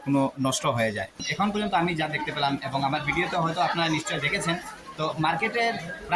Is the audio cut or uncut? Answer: uncut